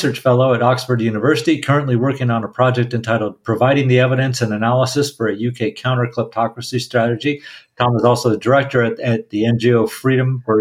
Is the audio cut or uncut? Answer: uncut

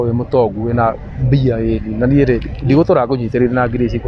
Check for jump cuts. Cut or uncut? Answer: uncut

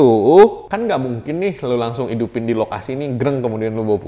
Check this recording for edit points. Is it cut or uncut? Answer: uncut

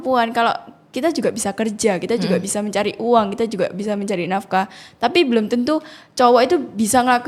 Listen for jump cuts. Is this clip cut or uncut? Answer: uncut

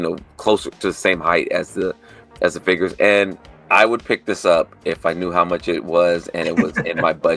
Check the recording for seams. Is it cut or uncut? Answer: cut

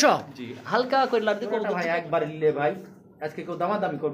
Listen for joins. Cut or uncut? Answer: cut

